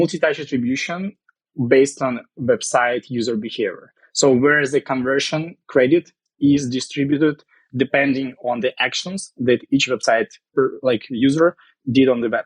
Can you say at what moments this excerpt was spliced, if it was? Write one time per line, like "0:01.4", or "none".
none